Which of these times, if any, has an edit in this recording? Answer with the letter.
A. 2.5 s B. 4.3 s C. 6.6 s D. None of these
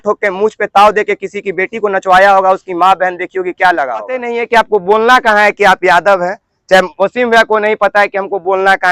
B